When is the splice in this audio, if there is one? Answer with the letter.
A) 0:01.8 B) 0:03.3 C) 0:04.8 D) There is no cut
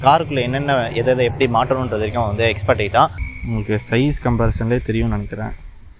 B